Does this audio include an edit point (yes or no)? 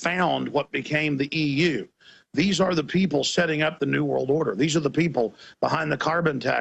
yes